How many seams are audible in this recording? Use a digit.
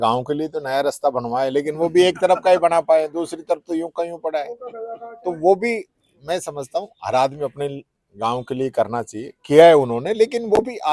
0